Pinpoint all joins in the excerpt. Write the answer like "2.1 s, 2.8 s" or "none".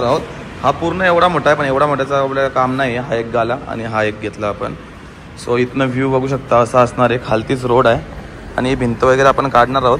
none